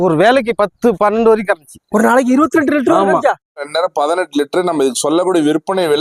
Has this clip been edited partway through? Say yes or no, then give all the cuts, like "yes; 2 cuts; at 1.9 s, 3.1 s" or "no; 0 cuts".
yes; 1 cut; at 3.6 s